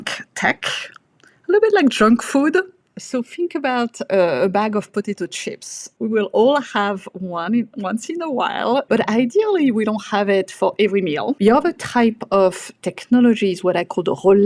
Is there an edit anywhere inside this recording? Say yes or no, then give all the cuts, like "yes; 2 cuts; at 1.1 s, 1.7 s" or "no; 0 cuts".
yes; 4 cuts; at 3.0 s, 5.8 s, 8.9 s, 11.4 s